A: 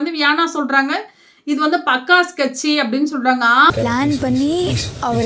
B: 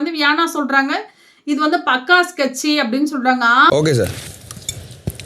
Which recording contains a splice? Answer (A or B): B